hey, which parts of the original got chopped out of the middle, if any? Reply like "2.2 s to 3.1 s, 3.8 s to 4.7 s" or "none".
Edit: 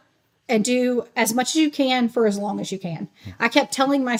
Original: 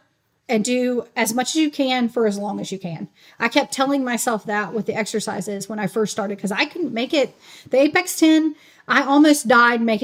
none